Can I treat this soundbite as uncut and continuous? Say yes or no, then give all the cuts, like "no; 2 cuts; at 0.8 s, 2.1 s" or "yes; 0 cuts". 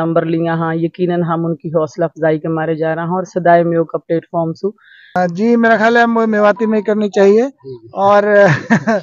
no; 1 cut; at 5.2 s